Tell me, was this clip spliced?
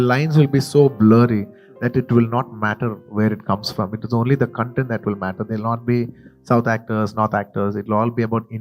no; 0 cuts

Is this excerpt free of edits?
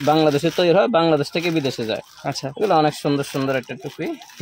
yes; 0 cuts

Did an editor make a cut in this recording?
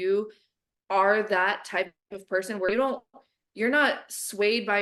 no; 0 cuts

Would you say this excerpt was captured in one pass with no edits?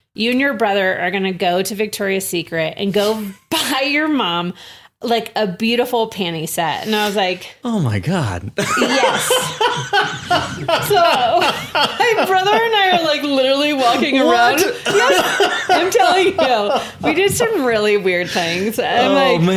yes; 0 cuts

